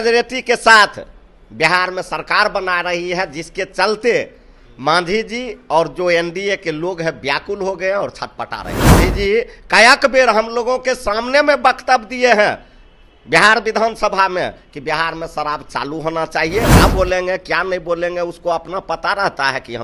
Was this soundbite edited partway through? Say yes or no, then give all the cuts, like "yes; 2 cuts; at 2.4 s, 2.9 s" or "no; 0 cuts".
yes; 2 cuts; at 9.0 s, 16.8 s